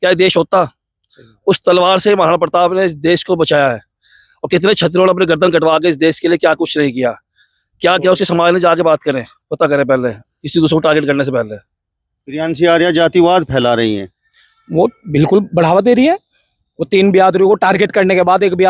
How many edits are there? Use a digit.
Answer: 0